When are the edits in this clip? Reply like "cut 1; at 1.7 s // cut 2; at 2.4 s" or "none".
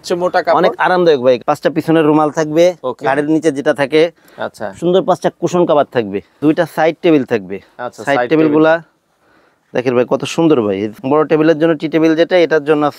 cut 1; at 1.4 s // cut 2; at 6.4 s // cut 3; at 10.9 s